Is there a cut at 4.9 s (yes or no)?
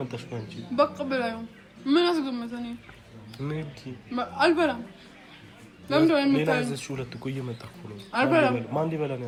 no